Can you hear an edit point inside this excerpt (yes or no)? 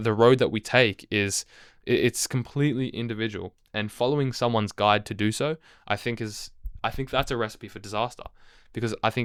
no